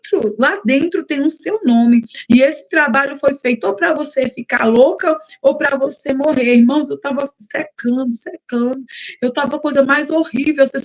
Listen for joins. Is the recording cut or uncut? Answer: uncut